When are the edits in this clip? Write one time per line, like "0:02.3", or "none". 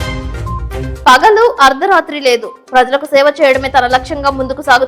0:00.9